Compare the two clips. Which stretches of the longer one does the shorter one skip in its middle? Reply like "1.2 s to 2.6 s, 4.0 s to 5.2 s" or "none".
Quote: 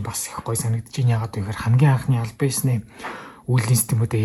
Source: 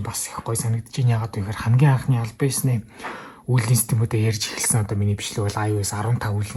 none